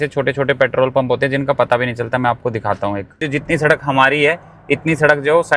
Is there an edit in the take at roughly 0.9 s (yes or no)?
no